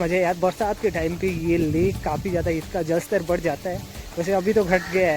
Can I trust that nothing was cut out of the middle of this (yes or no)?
yes